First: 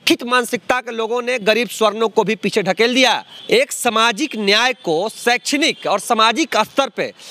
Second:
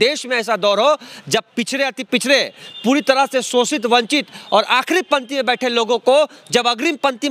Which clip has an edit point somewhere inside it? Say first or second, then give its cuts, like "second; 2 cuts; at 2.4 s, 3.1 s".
first; 1 cut; at 3.3 s